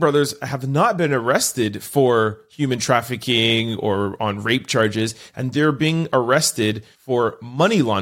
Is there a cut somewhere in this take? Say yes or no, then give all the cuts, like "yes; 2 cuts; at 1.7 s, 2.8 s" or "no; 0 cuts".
yes; 1 cut; at 6.9 s